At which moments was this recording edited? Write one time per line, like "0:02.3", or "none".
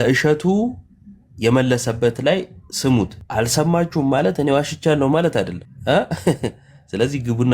0:03.2
0:05.7

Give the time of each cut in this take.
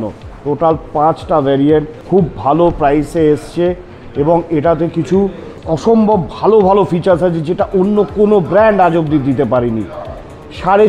0:02.0

